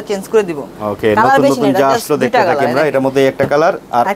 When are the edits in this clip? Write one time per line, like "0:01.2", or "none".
none